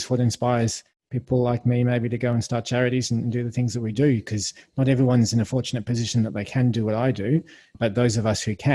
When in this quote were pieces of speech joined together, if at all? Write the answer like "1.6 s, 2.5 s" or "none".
7.8 s